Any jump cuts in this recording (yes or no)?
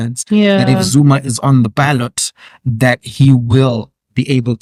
no